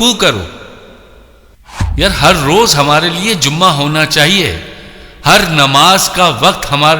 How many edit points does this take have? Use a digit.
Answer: 1